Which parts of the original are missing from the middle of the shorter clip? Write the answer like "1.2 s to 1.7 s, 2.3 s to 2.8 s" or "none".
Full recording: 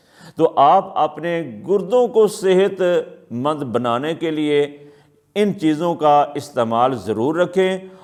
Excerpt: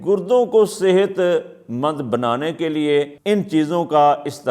4.8 s to 5.2 s